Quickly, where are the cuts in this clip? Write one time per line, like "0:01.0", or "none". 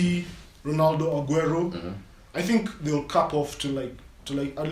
none